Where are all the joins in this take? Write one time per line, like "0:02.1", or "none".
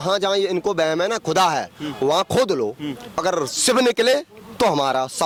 none